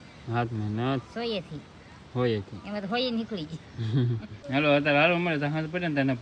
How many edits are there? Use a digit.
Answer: 1